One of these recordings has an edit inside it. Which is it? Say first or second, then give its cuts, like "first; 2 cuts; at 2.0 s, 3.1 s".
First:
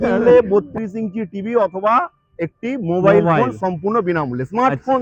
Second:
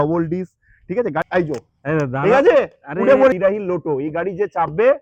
second; 2 cuts; at 1.2 s, 3.3 s